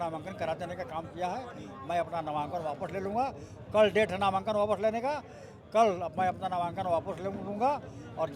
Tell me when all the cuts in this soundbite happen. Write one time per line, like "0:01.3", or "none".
none